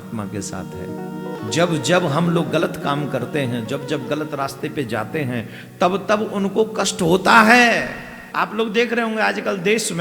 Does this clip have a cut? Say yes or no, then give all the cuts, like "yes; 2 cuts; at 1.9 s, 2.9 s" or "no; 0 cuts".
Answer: yes; 2 cuts; at 1.4 s, 8.2 s